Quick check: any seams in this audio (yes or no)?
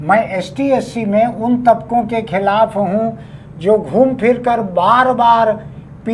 no